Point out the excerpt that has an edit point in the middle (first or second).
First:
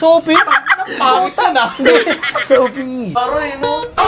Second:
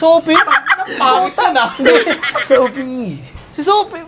first